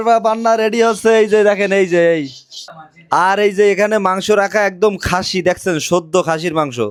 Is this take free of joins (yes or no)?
yes